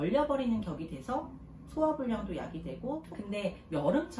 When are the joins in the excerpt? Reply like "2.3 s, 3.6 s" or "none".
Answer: 3.1 s